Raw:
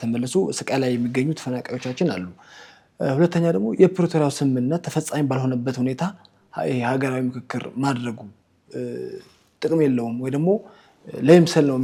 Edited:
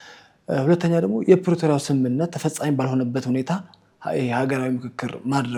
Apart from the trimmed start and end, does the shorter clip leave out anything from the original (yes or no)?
no